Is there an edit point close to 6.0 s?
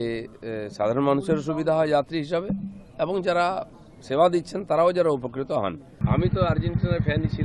yes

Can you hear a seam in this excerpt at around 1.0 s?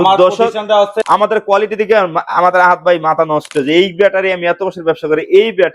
yes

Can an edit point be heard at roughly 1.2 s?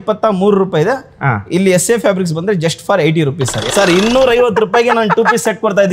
no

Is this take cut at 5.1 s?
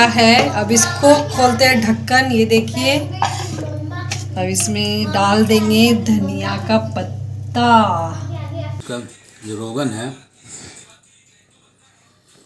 no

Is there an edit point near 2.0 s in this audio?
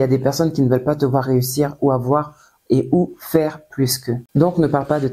no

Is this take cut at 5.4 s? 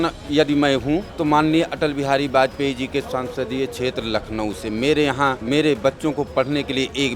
yes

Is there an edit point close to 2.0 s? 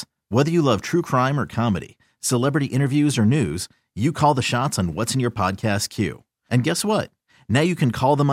no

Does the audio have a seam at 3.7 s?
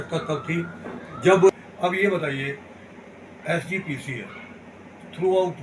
no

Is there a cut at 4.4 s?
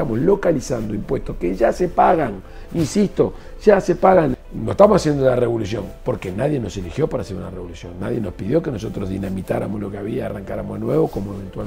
yes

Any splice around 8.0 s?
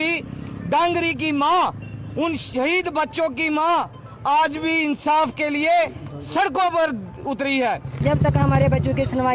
yes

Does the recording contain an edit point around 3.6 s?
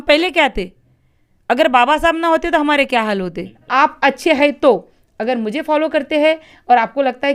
yes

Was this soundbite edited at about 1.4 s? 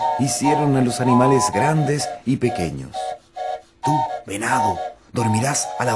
no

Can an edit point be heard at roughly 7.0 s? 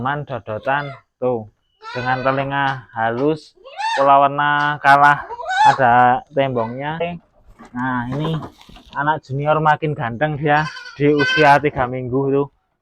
yes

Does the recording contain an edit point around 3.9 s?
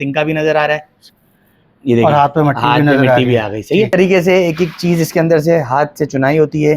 yes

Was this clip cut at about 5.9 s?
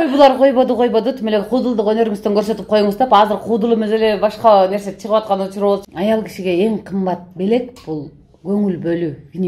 yes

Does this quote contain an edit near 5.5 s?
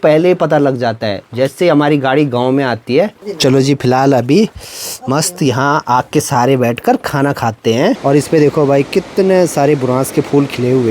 no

